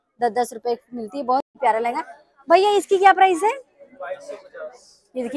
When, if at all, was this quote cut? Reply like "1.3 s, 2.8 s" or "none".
1.5 s